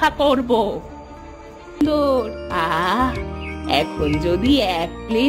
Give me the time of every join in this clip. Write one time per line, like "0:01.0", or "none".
0:01.8